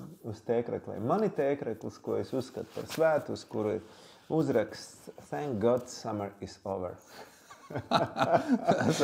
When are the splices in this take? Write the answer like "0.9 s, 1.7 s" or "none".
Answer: none

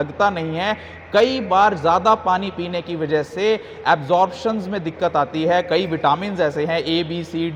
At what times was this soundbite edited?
none

